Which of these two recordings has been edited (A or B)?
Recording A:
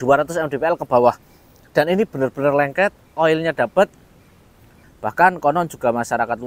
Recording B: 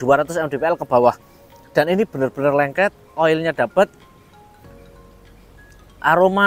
A